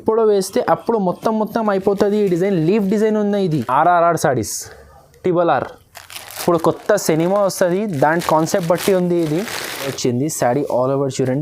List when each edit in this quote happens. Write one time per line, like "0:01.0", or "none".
0:03.6
0:09.9

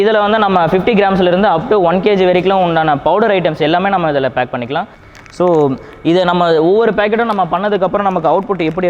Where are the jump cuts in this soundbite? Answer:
0:05.0

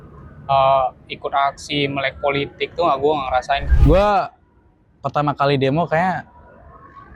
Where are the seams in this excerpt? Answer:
0:03.6

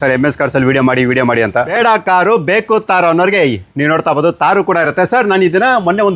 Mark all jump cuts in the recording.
0:01.7

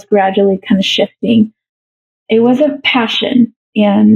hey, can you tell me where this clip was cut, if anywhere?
0:01.7

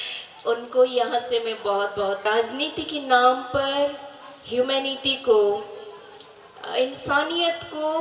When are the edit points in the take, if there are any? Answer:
0:02.2

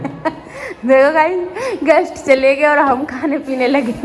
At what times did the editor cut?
none

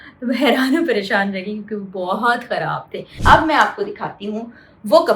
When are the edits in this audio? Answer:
0:03.1

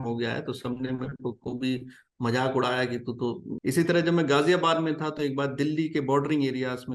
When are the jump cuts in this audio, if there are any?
0:03.5

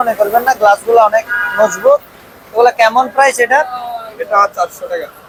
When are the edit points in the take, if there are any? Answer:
none

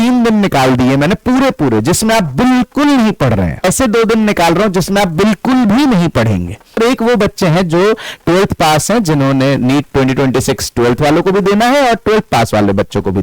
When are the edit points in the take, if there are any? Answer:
0:03.6
0:06.8

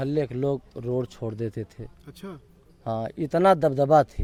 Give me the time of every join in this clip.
none

